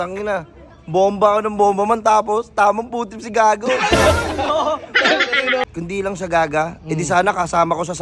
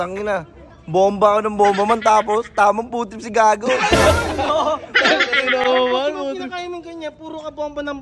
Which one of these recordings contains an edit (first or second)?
first